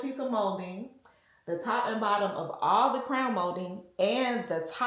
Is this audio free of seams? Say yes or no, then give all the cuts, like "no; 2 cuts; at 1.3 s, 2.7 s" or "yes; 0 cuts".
yes; 0 cuts